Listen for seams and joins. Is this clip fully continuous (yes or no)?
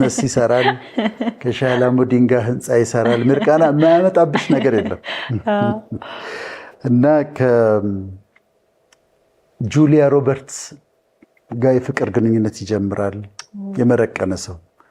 yes